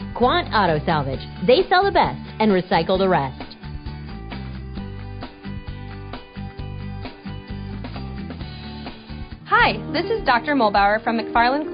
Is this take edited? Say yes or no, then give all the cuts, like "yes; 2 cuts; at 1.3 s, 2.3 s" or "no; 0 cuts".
yes; 1 cut; at 9.1 s